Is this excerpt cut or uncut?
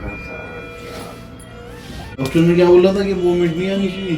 cut